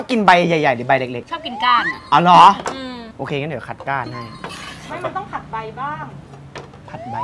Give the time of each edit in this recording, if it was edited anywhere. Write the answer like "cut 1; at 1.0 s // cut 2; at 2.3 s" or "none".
none